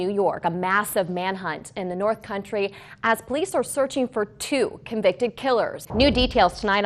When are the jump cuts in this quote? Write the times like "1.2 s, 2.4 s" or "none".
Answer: 5.8 s